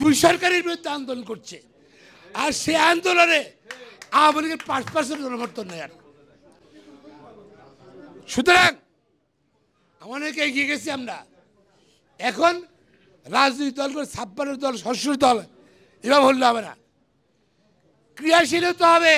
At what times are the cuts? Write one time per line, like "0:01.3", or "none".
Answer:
none